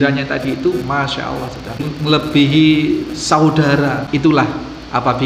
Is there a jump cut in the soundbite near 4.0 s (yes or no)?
yes